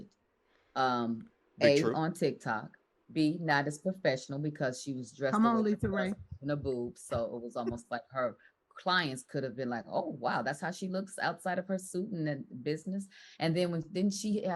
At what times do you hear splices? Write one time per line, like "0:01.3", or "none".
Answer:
none